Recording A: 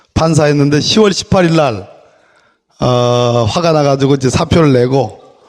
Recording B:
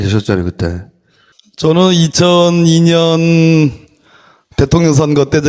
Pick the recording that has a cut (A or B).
A